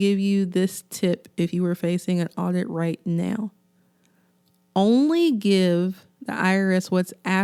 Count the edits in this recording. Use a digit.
0